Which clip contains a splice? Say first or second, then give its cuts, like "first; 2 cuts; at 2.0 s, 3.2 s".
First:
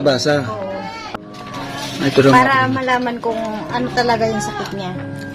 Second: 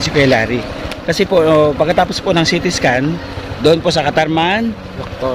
first; 1 cut; at 1.0 s